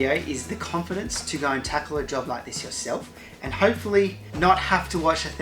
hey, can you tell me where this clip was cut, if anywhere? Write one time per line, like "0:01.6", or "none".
none